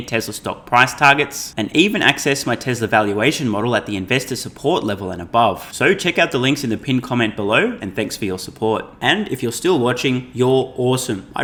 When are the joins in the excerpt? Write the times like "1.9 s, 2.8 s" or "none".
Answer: none